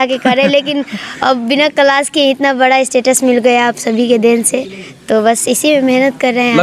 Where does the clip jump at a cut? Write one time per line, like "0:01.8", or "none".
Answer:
none